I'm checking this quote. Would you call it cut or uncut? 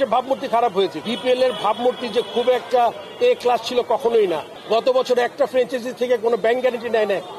cut